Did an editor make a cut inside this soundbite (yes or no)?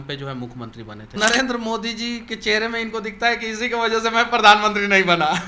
yes